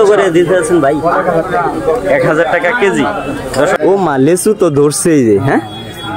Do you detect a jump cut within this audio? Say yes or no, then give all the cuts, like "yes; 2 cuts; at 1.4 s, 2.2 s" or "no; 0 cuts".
yes; 1 cut; at 3.8 s